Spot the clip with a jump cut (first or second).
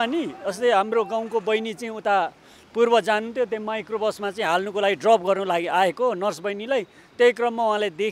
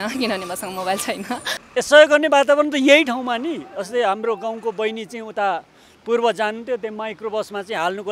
second